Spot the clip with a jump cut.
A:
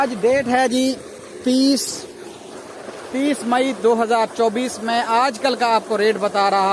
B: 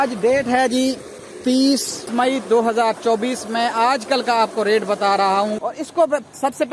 B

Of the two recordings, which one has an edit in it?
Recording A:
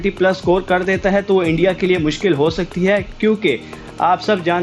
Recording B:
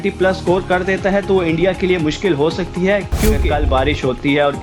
B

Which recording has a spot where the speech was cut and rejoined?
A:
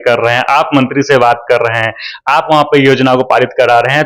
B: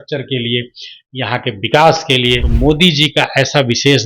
B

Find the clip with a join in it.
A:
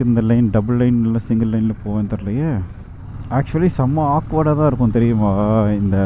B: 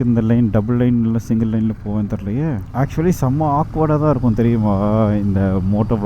B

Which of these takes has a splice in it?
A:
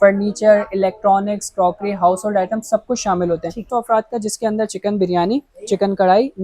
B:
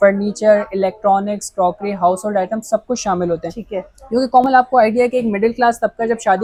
A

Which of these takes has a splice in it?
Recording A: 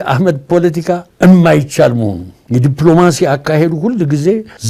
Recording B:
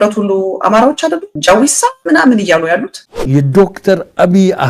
B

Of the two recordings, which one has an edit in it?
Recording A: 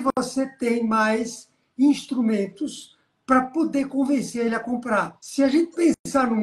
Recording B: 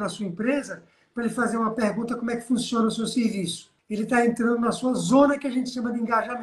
B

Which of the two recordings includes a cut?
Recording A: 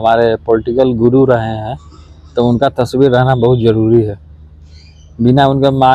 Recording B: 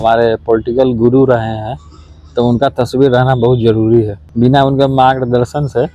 B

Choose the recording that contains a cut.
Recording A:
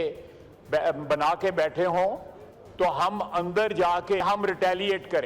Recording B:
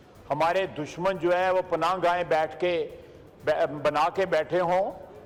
A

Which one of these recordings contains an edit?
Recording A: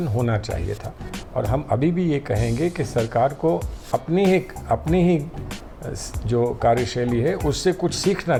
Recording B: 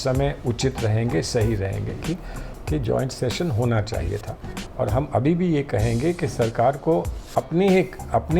B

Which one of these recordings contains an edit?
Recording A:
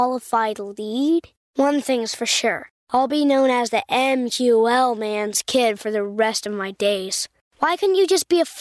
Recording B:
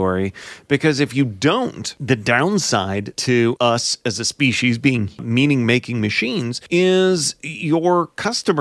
B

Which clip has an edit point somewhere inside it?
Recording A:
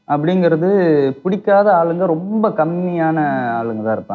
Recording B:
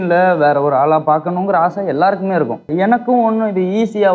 B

